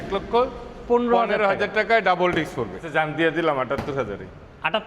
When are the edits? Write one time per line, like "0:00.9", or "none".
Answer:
0:02.8